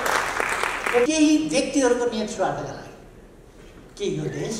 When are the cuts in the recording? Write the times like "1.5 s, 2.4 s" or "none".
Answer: 1.1 s